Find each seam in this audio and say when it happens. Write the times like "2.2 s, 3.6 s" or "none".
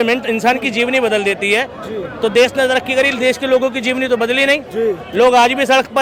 none